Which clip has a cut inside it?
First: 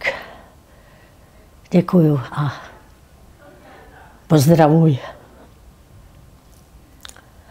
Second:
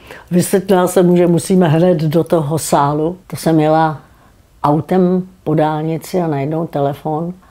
second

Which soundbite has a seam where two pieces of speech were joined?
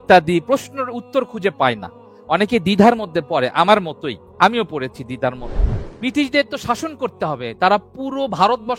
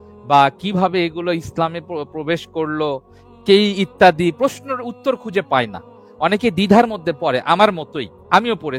first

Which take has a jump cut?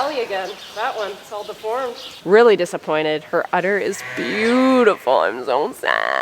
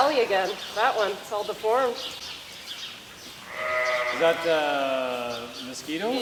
first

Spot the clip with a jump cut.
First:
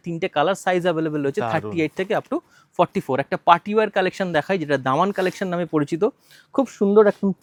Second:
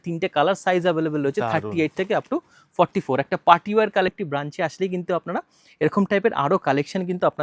second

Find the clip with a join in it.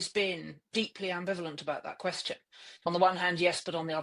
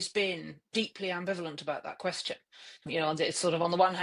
first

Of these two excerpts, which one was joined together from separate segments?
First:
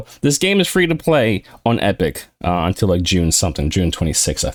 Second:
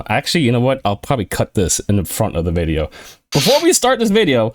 second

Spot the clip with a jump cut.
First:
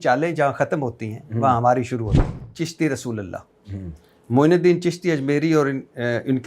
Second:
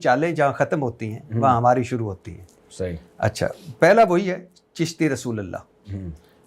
first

